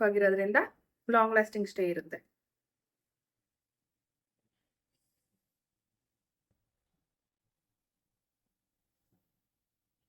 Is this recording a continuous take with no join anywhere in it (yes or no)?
yes